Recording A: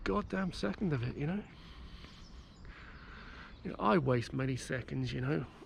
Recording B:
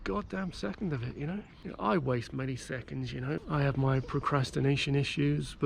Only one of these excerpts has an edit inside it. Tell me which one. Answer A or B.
B